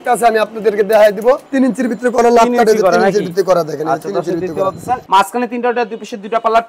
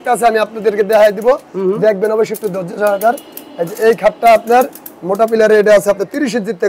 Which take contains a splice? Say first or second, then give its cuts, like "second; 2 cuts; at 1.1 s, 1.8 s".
first; 2 cuts; at 1.5 s, 5.0 s